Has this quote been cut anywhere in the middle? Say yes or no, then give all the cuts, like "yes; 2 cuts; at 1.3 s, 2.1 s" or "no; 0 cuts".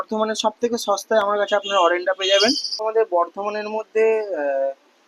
yes; 1 cut; at 2.9 s